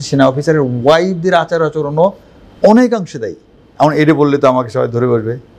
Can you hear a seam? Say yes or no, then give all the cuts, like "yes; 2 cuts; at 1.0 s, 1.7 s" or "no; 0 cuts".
no; 0 cuts